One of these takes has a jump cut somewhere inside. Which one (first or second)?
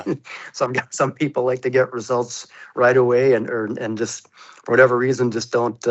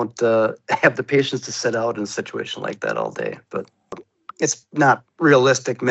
second